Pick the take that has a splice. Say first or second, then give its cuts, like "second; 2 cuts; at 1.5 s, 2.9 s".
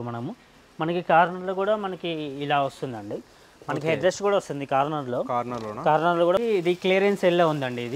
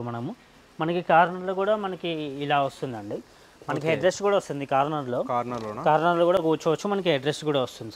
first; 1 cut; at 6.4 s